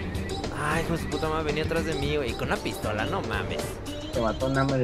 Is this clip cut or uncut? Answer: uncut